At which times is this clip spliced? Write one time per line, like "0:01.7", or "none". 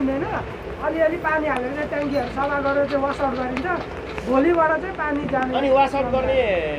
none